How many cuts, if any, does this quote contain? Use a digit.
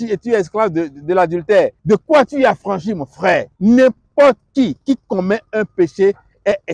2